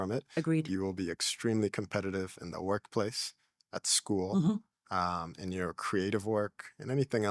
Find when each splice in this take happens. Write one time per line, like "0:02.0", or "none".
none